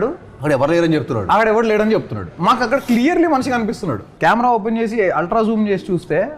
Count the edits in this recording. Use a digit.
1